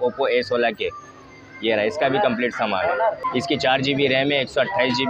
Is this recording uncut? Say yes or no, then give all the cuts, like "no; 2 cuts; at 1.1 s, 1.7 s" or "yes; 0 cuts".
no; 1 cut; at 3.2 s